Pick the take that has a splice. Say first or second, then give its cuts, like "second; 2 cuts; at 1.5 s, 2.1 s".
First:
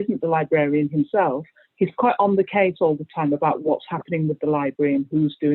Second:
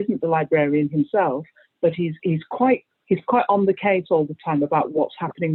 first; 1 cut; at 1.6 s